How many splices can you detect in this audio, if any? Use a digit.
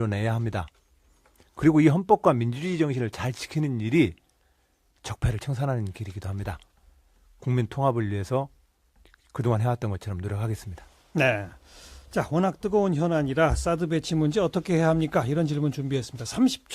1